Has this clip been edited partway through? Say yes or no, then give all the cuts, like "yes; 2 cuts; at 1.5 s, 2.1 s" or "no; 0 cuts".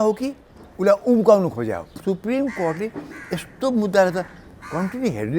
yes; 1 cut; at 2.0 s